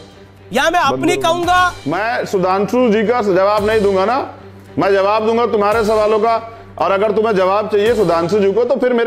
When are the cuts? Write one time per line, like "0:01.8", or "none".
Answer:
none

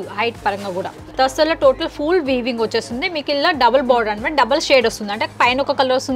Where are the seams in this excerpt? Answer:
0:01.0

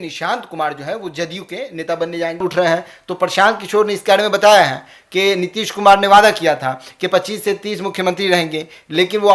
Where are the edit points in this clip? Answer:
0:02.4

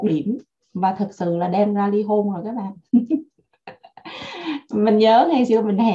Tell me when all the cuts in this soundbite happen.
none

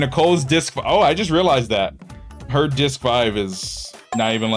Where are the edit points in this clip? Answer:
none

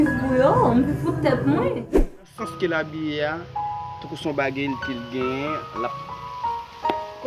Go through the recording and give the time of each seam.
0:01.8

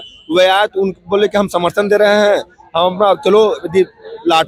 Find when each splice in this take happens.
none

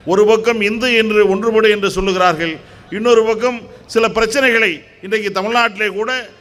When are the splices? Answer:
none

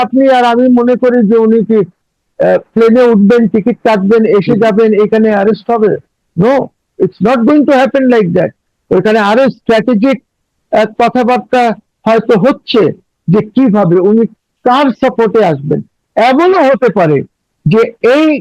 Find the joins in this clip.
none

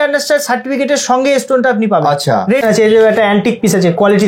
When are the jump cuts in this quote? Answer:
0:02.6

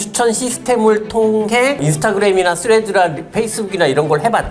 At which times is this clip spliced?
none

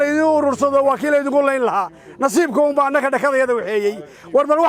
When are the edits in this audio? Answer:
none

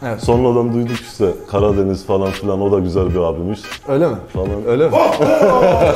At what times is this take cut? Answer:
none

